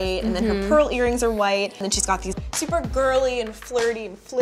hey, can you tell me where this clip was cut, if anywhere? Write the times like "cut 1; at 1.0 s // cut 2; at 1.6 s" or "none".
none